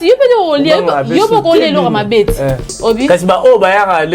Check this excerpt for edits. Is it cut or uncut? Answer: cut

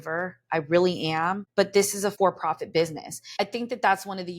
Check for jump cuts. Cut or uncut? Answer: cut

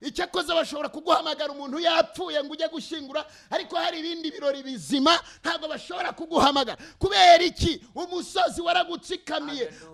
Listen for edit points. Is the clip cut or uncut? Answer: uncut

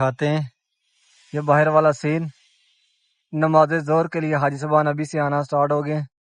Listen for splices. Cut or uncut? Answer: uncut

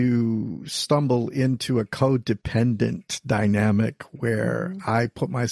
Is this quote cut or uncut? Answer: uncut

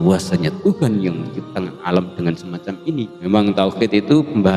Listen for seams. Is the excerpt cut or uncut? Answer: cut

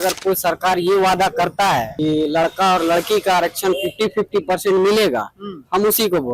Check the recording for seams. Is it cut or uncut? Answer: cut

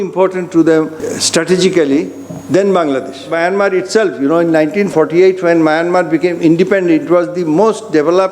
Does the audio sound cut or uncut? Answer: cut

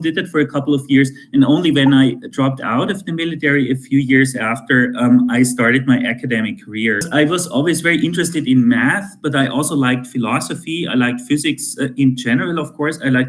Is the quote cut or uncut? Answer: cut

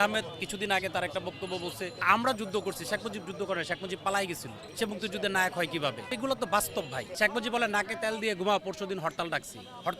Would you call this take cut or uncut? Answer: cut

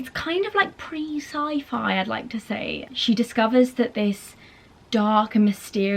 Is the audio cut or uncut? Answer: cut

